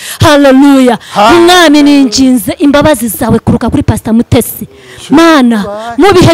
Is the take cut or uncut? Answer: uncut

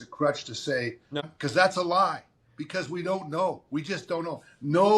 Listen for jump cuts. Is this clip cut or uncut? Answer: cut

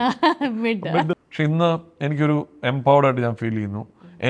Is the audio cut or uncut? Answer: cut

